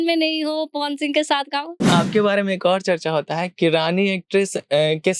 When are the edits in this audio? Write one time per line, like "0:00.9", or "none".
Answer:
0:01.9